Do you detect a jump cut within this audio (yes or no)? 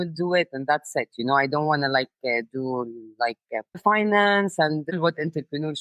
yes